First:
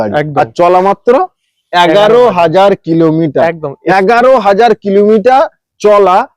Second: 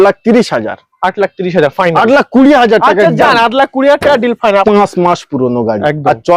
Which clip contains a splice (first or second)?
second